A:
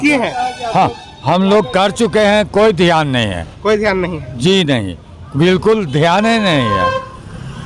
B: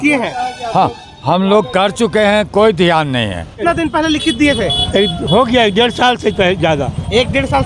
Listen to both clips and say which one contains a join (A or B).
B